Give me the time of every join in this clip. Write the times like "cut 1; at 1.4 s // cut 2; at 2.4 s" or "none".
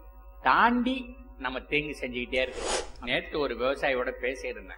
cut 1; at 2.9 s